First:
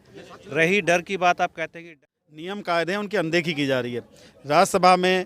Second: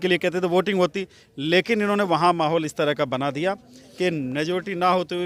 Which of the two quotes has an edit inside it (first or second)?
first